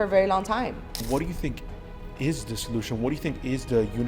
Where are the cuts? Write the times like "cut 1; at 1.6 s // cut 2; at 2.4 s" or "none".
cut 1; at 1.0 s